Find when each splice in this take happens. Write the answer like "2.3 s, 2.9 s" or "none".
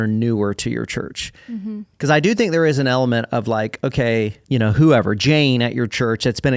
4.4 s